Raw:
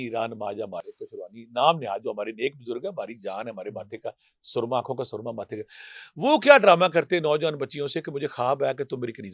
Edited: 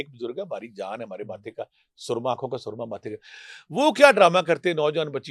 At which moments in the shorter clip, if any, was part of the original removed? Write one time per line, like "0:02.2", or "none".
none